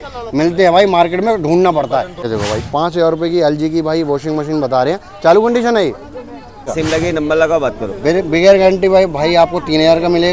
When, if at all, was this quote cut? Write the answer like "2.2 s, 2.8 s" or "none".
2.2 s, 6.7 s